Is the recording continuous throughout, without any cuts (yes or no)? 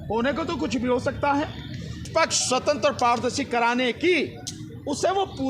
no